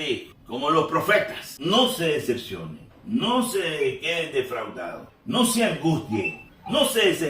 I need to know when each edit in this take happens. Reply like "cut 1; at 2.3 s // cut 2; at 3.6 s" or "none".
cut 1; at 1.4 s

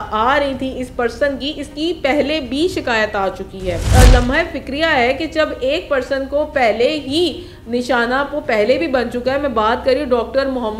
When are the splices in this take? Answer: cut 1; at 3.9 s

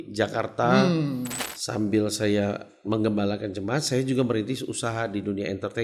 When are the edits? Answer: cut 1; at 1.3 s

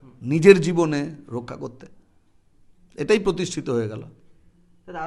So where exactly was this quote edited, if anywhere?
none

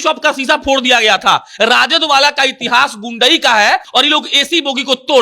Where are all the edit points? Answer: cut 1; at 3.9 s

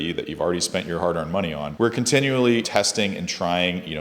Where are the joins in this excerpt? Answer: cut 1; at 1.7 s // cut 2; at 2.7 s

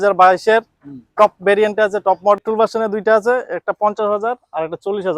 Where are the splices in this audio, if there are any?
cut 1; at 2.4 s

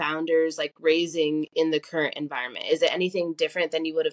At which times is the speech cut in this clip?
none

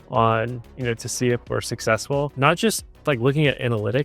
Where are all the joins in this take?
cut 1; at 2.3 s

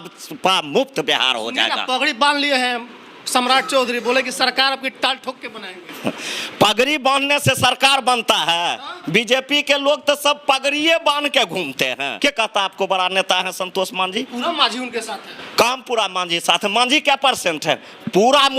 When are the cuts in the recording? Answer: cut 1; at 12.1 s

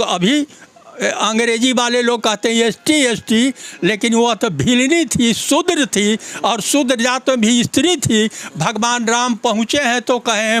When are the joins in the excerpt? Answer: none

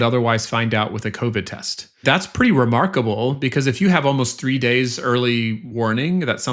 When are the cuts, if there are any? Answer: cut 1; at 2.0 s

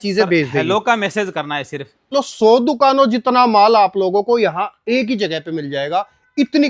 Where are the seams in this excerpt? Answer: cut 1; at 2.1 s

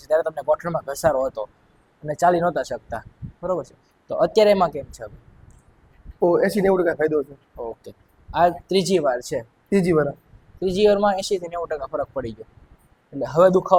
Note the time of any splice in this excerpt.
none

